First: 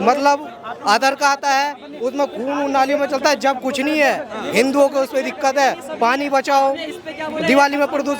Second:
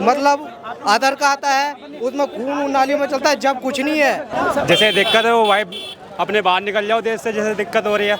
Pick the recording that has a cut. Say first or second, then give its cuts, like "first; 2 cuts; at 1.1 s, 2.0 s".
second; 1 cut; at 4.3 s